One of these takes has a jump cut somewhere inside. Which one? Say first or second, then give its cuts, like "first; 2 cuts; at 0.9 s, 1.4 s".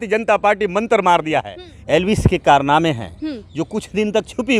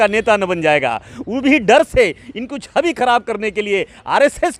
first; 1 cut; at 1.9 s